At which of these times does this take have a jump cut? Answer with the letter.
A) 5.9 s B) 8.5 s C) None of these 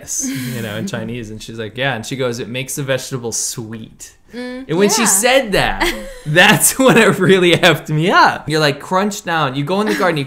B